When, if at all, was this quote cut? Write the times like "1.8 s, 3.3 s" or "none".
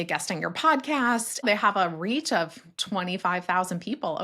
1.4 s